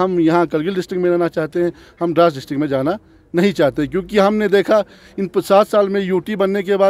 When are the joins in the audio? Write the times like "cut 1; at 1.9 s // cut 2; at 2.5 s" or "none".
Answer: none